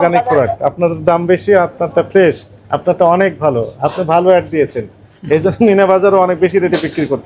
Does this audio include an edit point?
no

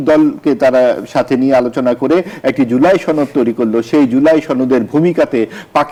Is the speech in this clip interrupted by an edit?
no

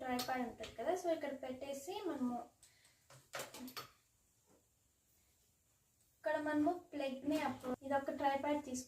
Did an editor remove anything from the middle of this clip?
yes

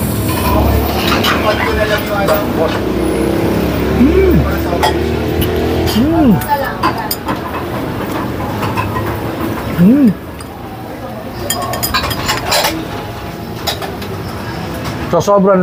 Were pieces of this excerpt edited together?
no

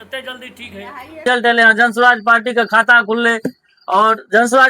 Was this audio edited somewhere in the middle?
yes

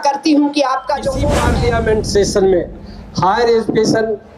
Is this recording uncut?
no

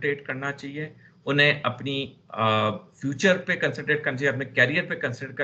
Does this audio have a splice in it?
no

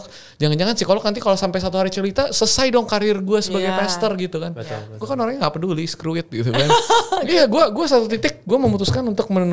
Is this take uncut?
yes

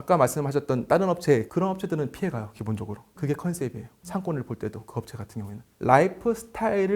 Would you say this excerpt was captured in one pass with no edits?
no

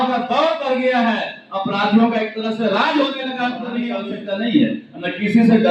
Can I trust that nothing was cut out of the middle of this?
no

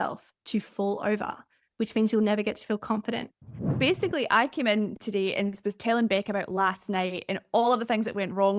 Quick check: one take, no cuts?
no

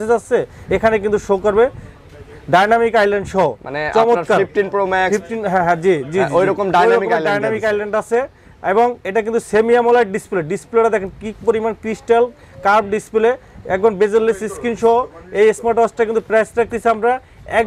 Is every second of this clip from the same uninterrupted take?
yes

